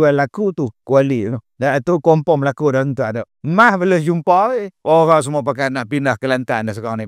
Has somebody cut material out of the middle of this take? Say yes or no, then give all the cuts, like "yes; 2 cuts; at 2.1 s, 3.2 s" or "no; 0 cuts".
yes; 2 cuts; at 1.4 s, 4.7 s